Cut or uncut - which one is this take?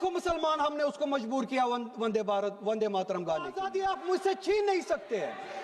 cut